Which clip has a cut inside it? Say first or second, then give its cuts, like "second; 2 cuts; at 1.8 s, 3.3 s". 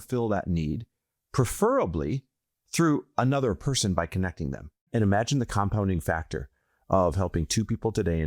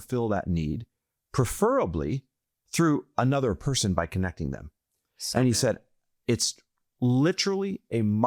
first; 1 cut; at 4.8 s